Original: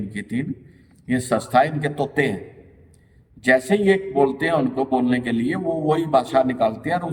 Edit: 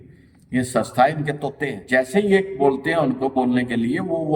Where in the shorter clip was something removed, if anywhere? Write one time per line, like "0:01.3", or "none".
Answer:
0:01.7